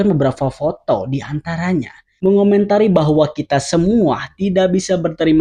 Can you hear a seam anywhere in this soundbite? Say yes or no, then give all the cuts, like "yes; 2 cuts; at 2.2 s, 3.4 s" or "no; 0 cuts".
yes; 1 cut; at 2.1 s